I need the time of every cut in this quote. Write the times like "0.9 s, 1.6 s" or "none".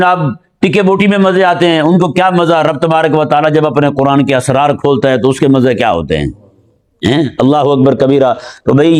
none